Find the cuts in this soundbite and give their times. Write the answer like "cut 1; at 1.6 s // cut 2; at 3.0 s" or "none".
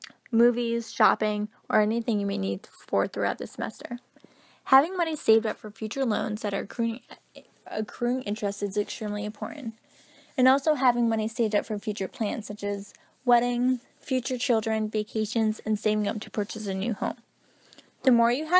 none